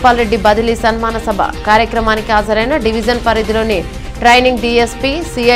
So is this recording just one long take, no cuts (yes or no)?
yes